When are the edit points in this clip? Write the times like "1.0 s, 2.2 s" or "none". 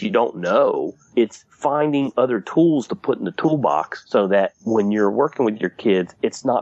1.2 s, 4.3 s